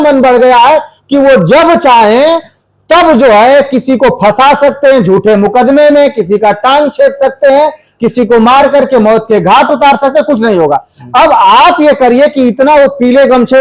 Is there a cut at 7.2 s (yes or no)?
no